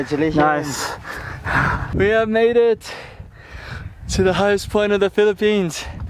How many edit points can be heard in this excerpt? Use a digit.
1